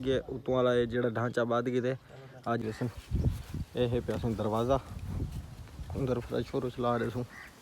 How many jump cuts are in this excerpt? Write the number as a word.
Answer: one